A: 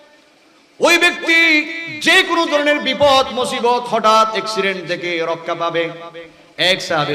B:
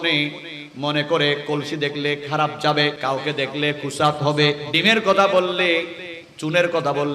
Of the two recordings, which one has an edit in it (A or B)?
B